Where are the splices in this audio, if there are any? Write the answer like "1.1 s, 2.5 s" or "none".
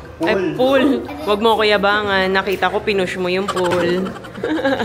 1.1 s